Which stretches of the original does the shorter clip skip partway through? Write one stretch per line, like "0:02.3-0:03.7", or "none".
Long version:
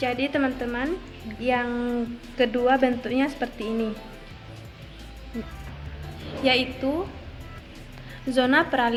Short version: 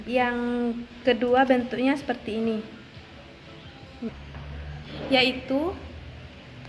none